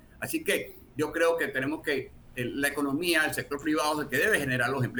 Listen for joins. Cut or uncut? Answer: uncut